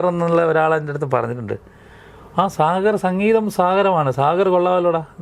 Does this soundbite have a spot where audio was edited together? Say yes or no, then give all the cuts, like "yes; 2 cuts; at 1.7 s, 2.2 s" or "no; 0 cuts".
no; 0 cuts